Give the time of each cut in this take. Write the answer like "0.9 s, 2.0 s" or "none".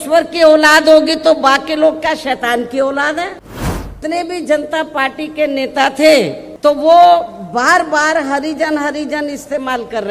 4.0 s, 6.4 s